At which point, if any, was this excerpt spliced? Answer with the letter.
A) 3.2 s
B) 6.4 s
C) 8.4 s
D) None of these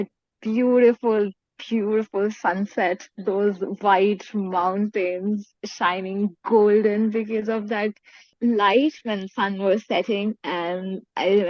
C